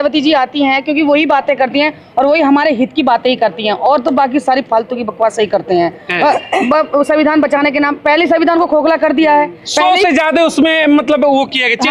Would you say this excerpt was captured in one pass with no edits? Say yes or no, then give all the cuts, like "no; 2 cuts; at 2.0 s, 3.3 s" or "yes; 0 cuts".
yes; 0 cuts